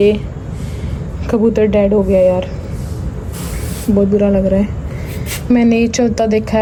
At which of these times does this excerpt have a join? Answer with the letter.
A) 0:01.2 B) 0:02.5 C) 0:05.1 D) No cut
D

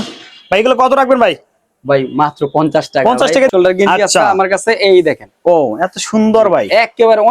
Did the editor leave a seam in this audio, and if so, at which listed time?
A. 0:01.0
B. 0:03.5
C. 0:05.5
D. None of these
B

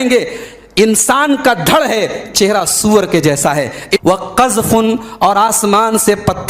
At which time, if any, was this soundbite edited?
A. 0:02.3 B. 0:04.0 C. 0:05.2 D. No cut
B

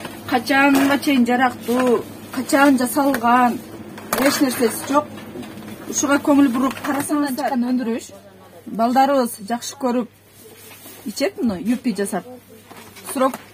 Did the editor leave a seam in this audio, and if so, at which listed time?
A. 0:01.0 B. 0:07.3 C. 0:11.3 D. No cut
B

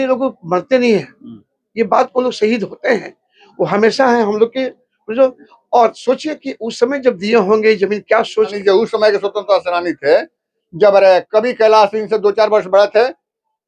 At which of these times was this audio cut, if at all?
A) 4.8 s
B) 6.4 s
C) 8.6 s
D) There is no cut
C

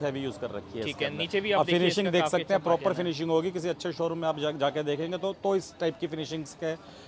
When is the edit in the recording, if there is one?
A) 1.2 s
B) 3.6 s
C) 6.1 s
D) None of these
D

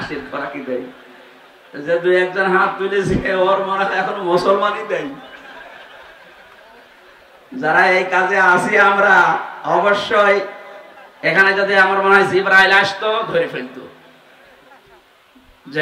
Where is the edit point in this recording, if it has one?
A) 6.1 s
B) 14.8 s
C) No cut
C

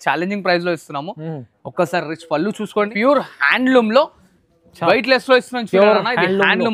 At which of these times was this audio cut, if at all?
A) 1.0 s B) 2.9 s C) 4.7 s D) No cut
B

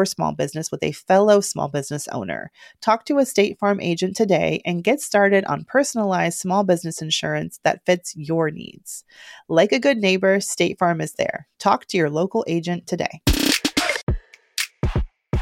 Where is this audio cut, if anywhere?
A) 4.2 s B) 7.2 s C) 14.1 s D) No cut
C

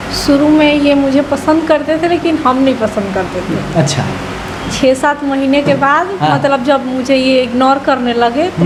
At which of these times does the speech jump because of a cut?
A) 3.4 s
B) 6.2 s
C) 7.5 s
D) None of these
D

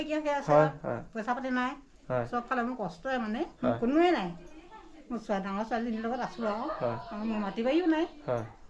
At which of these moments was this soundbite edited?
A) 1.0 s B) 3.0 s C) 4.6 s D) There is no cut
D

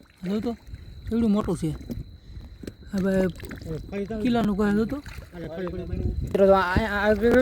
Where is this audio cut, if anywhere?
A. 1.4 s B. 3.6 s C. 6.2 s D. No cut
C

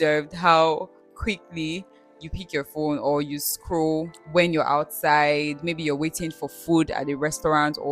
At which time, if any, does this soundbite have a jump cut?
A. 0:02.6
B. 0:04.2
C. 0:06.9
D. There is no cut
B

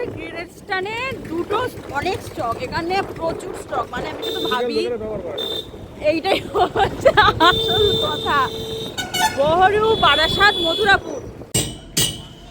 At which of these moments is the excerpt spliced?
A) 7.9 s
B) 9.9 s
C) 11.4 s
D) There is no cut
C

